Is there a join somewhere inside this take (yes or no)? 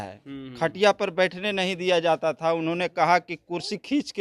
no